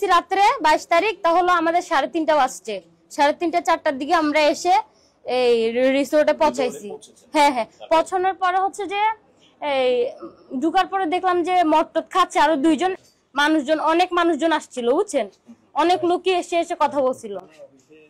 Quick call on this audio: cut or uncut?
cut